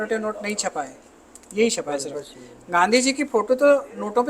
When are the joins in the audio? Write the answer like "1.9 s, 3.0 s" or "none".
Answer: none

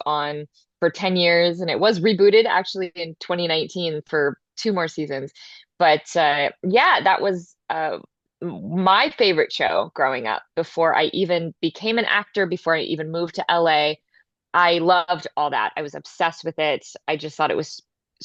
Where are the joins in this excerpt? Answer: none

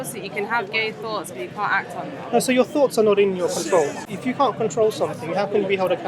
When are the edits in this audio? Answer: 4.0 s

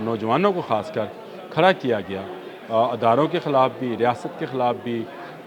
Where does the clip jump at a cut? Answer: none

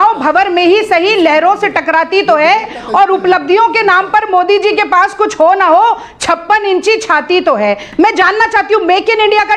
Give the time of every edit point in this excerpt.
7.8 s

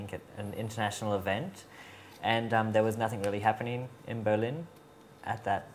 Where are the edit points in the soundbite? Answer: 1.6 s

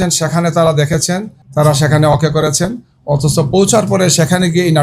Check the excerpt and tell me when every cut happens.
1.4 s

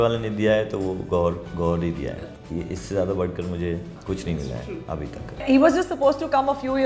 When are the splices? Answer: 2.1 s, 3.9 s, 5.4 s

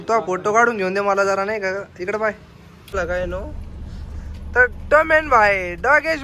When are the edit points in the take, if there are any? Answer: 2.9 s

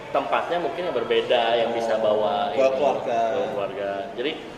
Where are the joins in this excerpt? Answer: none

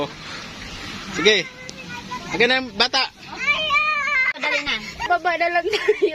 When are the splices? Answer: none

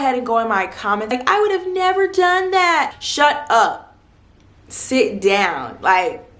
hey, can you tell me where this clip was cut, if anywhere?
1.1 s

